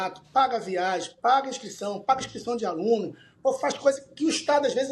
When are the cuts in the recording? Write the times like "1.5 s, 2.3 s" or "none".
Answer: none

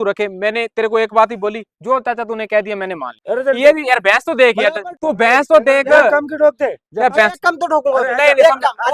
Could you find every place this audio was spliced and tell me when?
3.1 s, 4.9 s

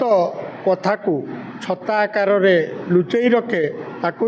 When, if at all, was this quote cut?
none

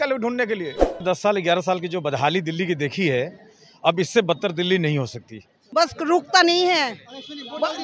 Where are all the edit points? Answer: 1.0 s, 5.5 s

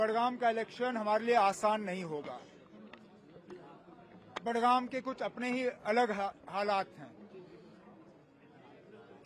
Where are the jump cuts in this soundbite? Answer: none

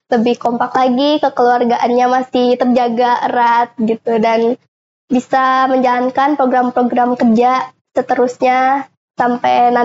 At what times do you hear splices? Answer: none

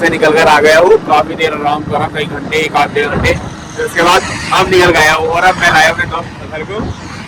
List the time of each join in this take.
none

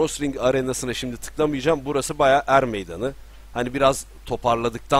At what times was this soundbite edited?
none

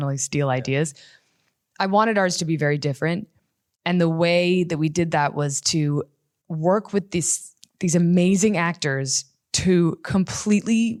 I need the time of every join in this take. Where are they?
none

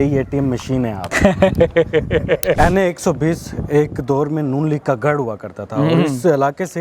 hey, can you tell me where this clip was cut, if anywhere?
1.1 s, 2.6 s

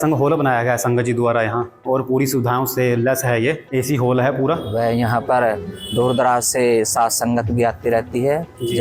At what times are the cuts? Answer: 1.8 s, 3.6 s, 4.7 s

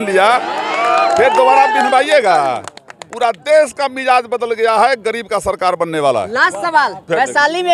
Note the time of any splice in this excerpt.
none

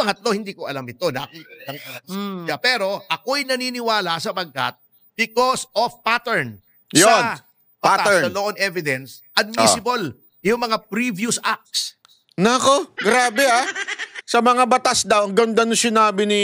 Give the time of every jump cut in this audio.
none

